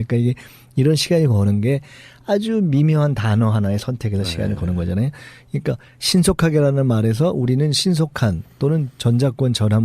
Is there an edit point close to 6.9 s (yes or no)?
yes